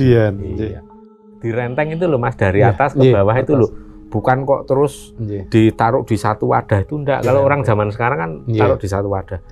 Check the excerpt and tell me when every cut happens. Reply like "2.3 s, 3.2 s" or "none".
1.2 s